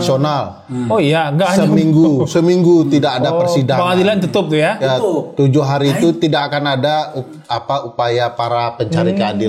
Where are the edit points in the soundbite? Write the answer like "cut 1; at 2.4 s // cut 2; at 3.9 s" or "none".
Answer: none